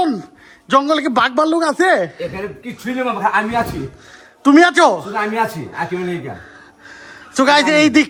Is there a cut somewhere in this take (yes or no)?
no